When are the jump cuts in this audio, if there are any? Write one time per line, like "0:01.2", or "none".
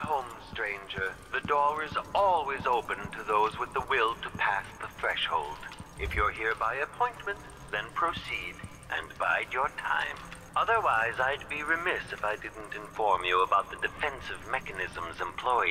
none